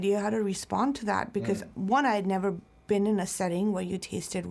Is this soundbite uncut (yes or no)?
yes